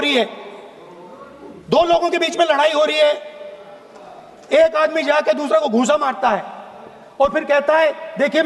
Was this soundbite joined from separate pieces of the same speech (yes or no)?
no